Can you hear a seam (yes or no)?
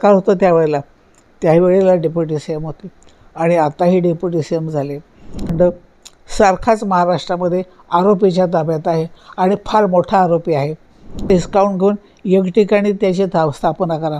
yes